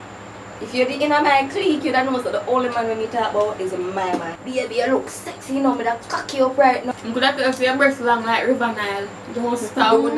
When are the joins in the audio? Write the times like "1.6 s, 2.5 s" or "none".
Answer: 4.3 s, 6.9 s